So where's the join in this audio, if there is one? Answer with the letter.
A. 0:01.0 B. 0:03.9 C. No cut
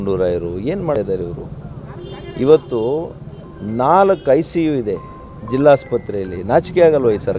A